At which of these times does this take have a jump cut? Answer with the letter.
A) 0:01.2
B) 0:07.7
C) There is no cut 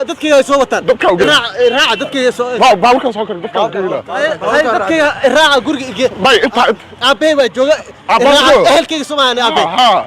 A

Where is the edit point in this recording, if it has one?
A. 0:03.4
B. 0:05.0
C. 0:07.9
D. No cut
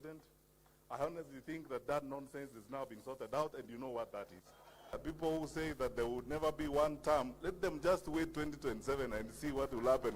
B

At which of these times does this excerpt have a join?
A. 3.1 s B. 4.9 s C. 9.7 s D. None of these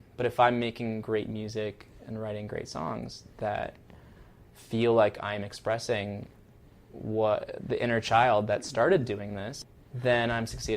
C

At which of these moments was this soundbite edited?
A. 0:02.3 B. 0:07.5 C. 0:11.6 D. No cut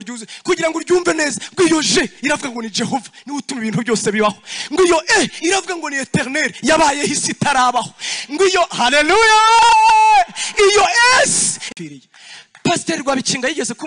C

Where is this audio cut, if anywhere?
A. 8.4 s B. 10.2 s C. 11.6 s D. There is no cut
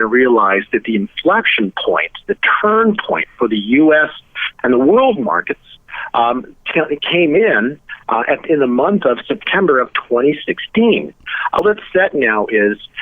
C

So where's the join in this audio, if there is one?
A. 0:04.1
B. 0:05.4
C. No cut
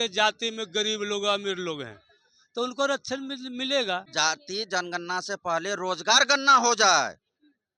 A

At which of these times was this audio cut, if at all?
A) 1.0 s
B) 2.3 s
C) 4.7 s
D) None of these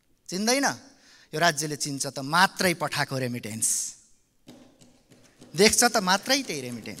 D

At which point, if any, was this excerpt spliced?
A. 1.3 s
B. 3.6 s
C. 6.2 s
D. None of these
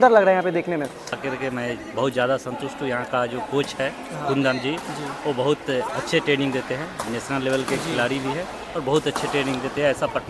A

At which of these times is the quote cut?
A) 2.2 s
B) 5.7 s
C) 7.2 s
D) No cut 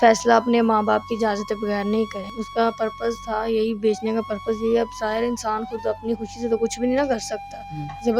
A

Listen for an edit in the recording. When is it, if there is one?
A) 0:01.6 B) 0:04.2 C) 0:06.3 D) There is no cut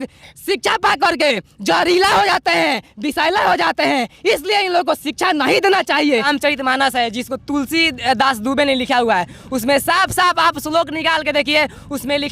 C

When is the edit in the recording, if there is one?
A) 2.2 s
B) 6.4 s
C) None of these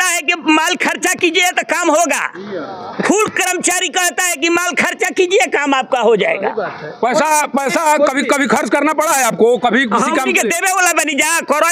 C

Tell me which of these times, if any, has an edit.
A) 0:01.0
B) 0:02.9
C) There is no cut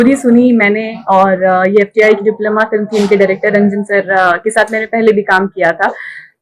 C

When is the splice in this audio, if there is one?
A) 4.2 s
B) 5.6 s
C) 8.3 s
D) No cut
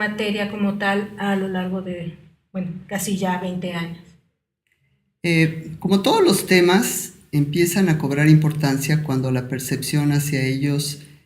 B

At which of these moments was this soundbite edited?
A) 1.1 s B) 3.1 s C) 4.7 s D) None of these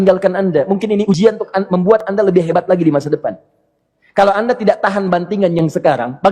A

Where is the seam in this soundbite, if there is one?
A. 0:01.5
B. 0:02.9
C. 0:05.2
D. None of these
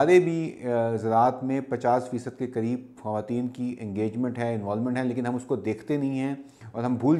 D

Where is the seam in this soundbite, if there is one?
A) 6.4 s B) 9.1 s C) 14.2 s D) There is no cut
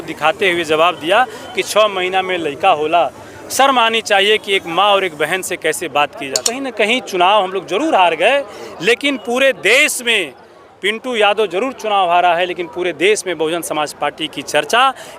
A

